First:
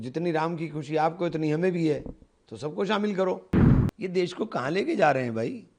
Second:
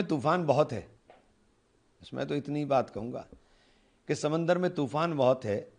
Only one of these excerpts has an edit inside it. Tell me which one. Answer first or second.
first